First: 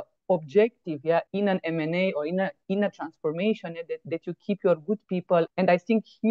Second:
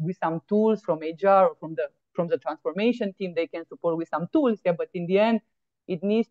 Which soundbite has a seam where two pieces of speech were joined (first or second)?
first